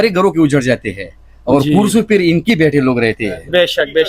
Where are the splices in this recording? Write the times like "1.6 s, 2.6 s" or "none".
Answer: none